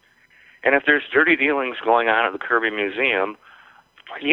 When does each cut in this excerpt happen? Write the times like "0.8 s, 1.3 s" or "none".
none